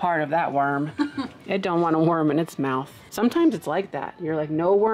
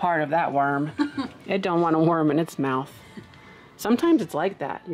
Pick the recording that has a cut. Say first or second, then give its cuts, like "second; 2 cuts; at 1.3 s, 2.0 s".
first; 1 cut; at 3.0 s